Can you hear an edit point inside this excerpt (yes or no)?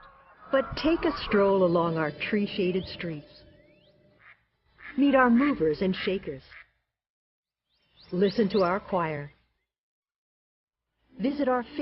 yes